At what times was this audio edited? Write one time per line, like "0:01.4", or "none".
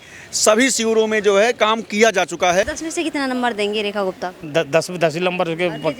0:02.8
0:04.4